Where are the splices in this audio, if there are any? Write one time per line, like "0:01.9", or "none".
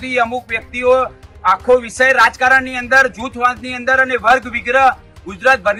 none